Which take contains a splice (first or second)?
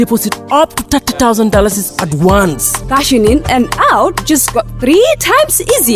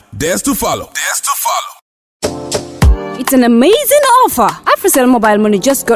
second